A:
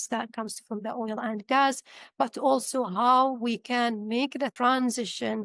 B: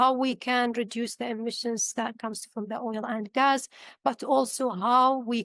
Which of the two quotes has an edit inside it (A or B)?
A